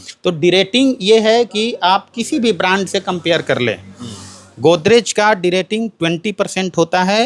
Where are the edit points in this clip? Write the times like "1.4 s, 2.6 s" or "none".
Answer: none